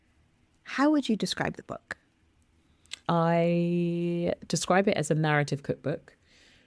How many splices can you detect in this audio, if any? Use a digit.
0